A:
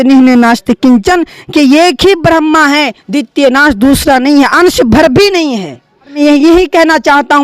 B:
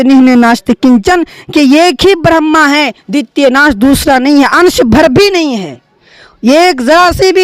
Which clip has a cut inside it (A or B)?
A